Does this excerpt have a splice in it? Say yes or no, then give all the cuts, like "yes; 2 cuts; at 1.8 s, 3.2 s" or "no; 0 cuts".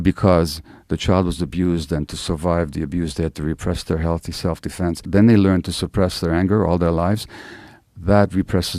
yes; 1 cut; at 5.0 s